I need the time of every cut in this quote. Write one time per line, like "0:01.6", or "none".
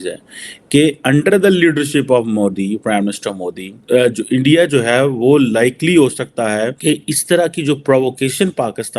0:03.7
0:06.8